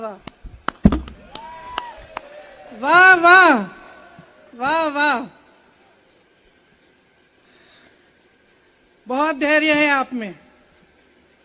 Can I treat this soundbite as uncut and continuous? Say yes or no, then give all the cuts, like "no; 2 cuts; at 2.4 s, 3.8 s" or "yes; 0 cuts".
no; 1 cut; at 1.2 s